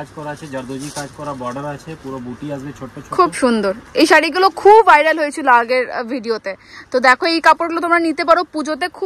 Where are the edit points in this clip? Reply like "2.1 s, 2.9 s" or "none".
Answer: none